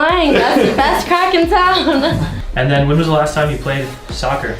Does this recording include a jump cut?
yes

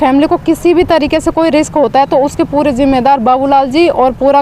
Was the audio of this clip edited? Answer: no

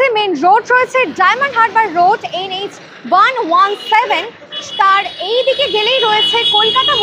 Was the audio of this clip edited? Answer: no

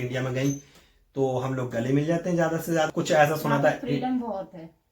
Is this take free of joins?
no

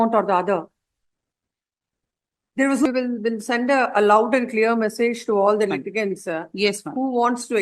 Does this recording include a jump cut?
yes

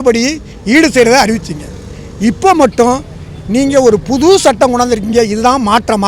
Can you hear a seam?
no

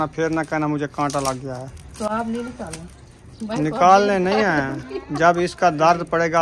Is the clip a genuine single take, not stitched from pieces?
yes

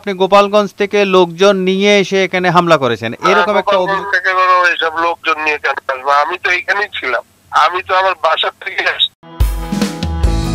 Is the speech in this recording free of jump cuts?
yes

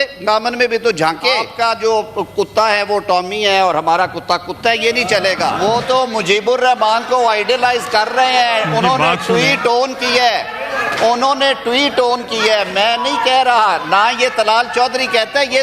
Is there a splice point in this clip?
yes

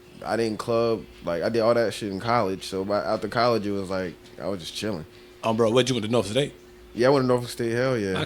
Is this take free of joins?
yes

